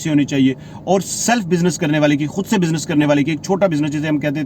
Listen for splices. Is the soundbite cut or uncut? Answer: uncut